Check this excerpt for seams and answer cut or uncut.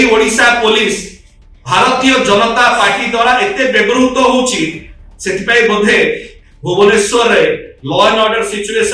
uncut